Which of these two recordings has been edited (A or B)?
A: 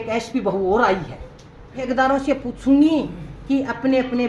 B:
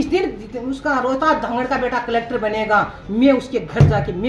A